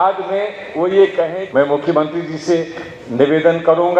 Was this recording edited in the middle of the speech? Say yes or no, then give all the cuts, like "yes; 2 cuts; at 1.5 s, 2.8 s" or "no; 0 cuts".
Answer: yes; 1 cut; at 1.4 s